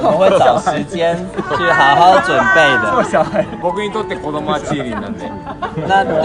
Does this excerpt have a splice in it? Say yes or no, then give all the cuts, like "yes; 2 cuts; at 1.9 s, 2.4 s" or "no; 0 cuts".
yes; 1 cut; at 3.5 s